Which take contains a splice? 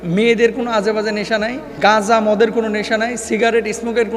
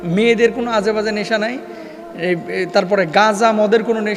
first; 1 cut; at 1.8 s

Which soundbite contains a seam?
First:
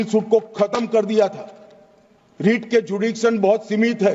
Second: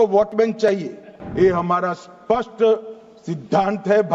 second; 1 cut; at 1.2 s

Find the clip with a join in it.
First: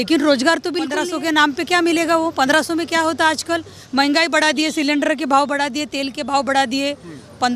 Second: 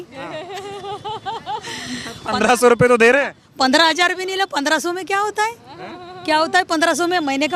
first; 1 cut; at 1.1 s

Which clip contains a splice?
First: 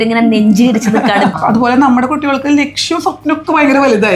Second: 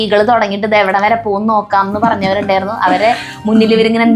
first; 1 cut; at 1.3 s

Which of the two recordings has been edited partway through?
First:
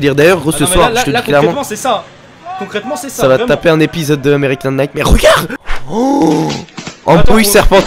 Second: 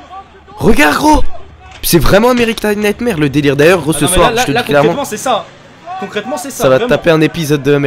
first; 1 cut; at 5.5 s

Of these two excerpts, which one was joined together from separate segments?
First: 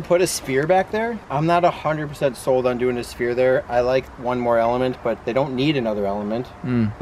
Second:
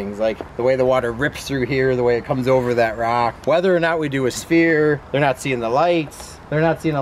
first; 1 cut; at 1.2 s

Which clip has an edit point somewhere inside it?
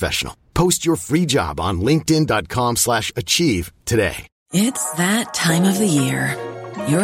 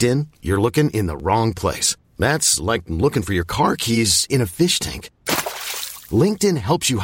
first; 1 cut; at 4.3 s

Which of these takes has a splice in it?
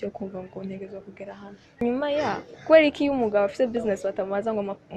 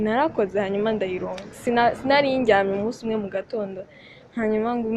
first; 1 cut; at 1.8 s

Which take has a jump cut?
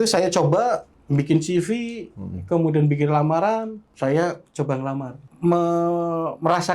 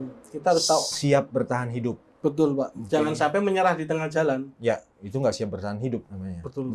first; 3 cuts; at 0.9 s, 3.8 s, 5.2 s

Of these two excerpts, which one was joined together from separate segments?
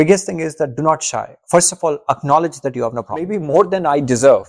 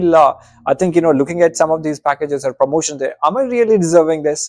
first; 1 cut; at 3.4 s

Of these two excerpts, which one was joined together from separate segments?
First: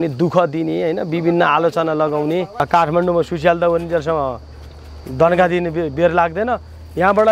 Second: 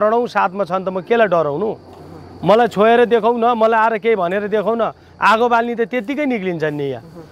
first; 1 cut; at 2.6 s

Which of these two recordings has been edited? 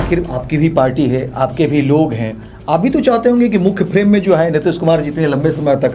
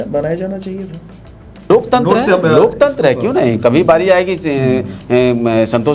second; 1 cut; at 1.6 s

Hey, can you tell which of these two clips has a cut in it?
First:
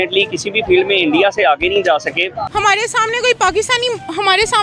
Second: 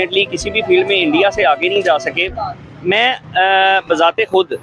first; 1 cut; at 2.4 s

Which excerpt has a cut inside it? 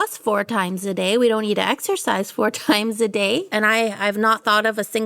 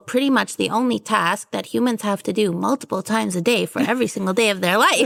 first; 1 cut; at 3.5 s

